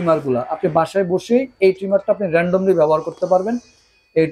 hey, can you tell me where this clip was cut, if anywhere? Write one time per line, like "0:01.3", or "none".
none